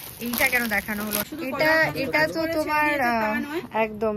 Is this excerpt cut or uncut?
cut